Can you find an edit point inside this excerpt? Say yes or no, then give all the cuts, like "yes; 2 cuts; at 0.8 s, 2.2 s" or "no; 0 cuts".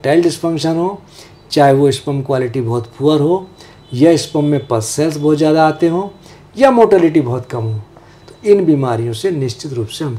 no; 0 cuts